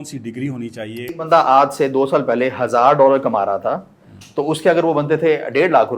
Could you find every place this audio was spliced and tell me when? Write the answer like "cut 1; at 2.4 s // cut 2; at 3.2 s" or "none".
cut 1; at 1.2 s